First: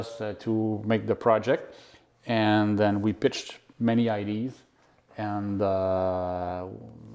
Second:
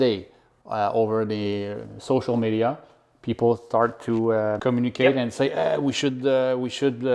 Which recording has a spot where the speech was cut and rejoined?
second; 1 cut; at 4.6 s

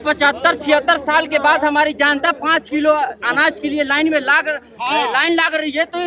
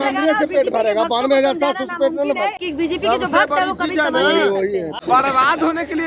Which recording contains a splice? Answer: second; 2 cuts; at 2.6 s, 4.9 s

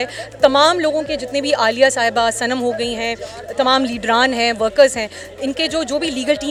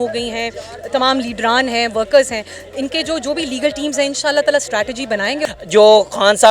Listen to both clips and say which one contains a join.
second; 1 cut; at 5.4 s

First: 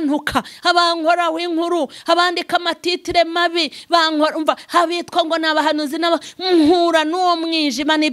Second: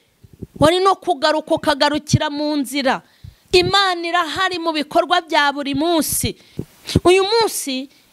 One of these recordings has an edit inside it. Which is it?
second; 1 cut; at 6.7 s

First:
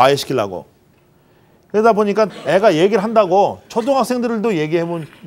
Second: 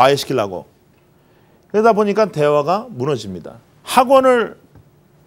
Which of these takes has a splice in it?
first; 1 cut; at 2.3 s

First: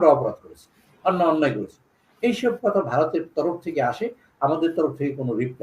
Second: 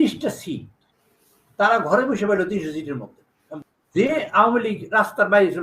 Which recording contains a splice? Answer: second; 1 cut; at 3.5 s

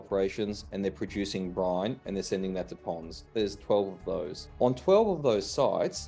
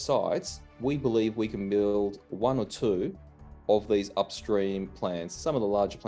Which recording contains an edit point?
first; 1 cut; at 4.4 s

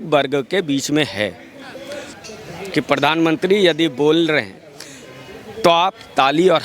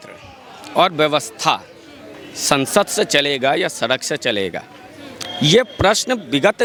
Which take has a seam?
first; 1 cut; at 2.1 s

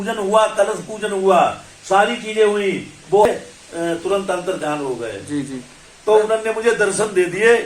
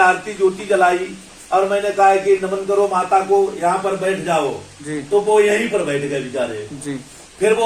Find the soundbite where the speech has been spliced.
first; 1 cut; at 3.2 s

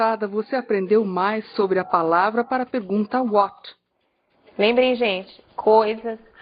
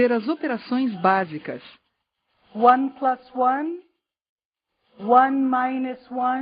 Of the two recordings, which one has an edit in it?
second; 1 cut; at 3.4 s

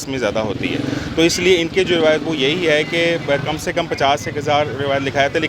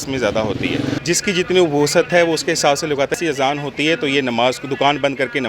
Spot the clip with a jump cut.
second; 2 cuts; at 1.0 s, 3.2 s

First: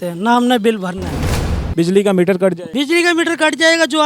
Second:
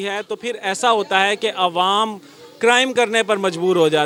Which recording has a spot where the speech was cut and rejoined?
first; 2 cuts; at 1.5 s, 2.6 s

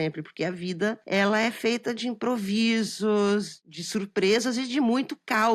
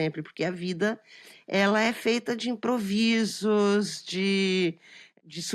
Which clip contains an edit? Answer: first; 2 cuts; at 1.0 s, 3.6 s

